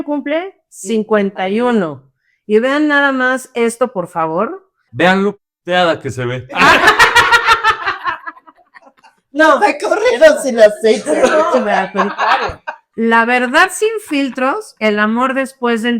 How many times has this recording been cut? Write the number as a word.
two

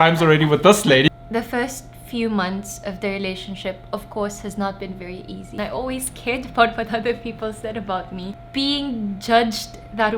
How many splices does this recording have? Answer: three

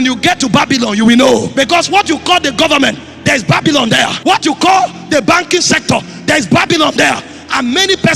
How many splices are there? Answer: two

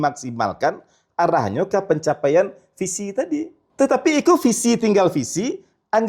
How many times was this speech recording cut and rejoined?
one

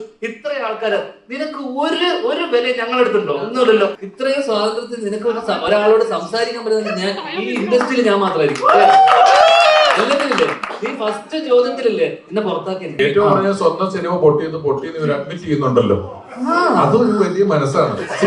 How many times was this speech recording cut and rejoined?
two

